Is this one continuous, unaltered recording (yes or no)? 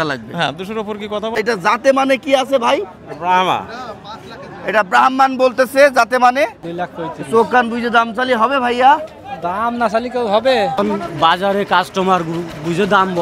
no